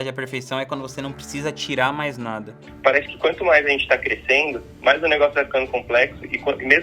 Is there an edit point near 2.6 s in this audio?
yes; 2 cuts; at 2.6 s, 4.6 s

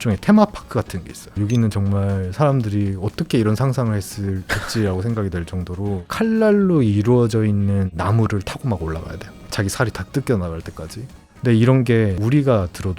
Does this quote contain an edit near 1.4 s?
yes; 4 cuts; at 1.4 s, 6.1 s, 11.2 s, 12.2 s

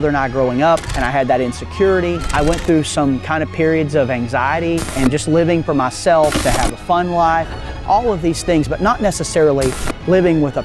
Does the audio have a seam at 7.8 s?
no; 4 cuts; at 1.0 s, 2.3 s, 4.9 s, 6.4 s

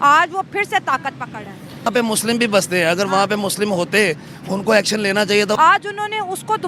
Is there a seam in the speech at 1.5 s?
no; 1 cut; at 5.6 s

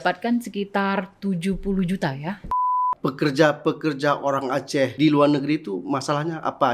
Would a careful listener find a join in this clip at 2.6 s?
yes; 2 cuts; at 2.6 s, 4.9 s

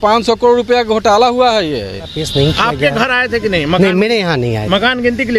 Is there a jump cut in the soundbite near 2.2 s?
yes; 1 cut; at 2.2 s

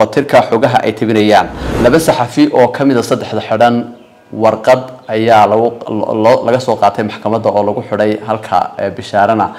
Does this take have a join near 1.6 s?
yes; 1 cut; at 1.6 s

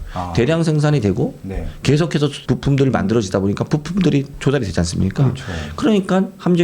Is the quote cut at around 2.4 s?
yes; 1 cut; at 2.4 s

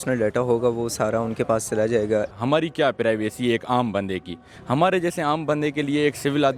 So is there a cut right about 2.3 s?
yes; 2 cuts; at 2.3 s, 4.5 s

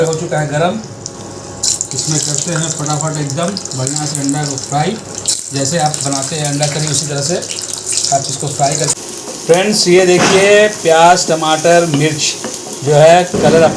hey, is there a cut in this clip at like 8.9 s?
yes; 1 cut; at 8.9 s

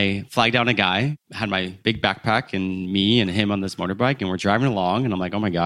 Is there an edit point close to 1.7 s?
yes; 1 cut; at 1.7 s

